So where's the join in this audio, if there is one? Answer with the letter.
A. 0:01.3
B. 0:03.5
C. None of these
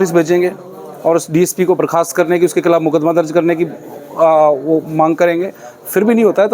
C